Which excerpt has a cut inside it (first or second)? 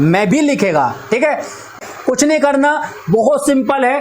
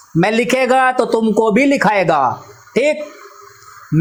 first